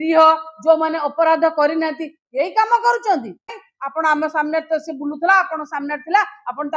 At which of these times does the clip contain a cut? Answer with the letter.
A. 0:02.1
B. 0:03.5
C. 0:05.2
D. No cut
B